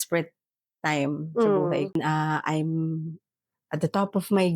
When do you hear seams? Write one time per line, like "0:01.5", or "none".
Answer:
0:02.0